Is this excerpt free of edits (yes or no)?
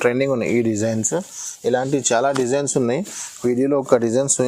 yes